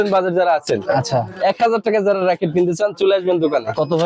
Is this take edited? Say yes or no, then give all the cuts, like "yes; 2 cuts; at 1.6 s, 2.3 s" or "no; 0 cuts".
no; 0 cuts